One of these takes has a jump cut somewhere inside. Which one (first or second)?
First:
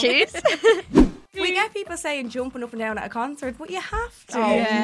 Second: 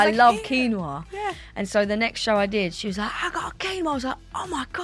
first